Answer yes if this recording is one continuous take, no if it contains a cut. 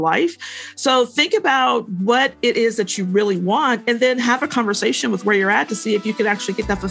yes